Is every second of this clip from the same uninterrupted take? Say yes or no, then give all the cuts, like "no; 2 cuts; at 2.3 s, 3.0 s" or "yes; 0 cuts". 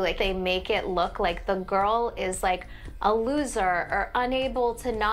yes; 0 cuts